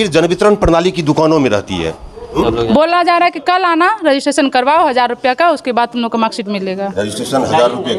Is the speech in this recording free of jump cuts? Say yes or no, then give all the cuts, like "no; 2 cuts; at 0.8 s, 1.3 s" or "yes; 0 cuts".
no; 1 cut; at 2.3 s